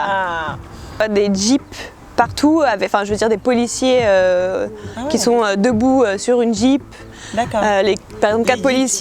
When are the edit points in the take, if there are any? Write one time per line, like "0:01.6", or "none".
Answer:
0:01.0